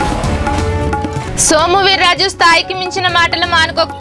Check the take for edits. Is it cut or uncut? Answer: uncut